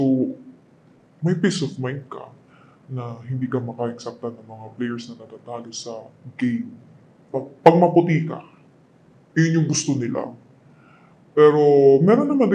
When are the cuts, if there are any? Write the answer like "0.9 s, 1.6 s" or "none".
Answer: 7.4 s